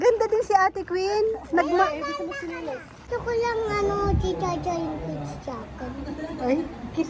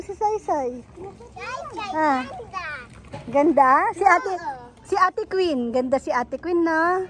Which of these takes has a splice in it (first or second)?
first